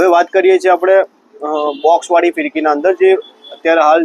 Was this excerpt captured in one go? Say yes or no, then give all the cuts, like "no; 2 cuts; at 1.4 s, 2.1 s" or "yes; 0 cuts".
yes; 0 cuts